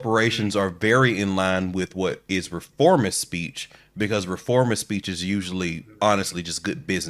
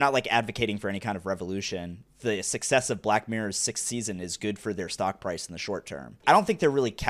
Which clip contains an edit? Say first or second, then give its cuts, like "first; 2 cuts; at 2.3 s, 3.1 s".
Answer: second; 2 cuts; at 2.0 s, 6.2 s